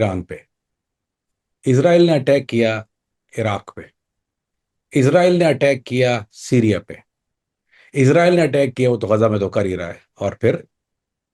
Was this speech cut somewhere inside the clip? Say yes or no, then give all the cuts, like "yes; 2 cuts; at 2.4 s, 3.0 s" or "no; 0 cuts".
no; 0 cuts